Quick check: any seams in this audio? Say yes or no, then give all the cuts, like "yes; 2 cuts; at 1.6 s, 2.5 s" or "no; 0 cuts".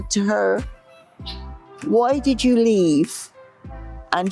no; 0 cuts